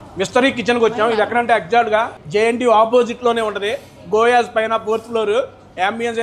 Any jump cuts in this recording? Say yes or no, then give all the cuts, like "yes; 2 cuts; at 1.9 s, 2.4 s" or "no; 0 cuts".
yes; 1 cut; at 2.2 s